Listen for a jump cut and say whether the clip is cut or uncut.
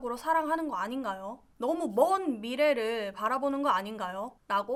uncut